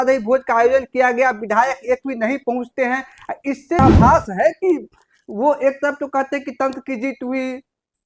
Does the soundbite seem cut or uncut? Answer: cut